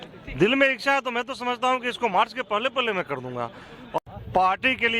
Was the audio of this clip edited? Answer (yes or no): yes